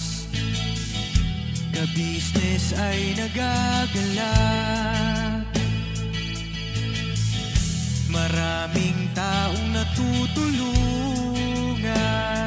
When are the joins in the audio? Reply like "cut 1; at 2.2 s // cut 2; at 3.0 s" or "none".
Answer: none